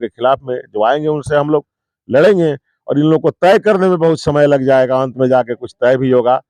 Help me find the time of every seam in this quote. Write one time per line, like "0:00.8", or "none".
none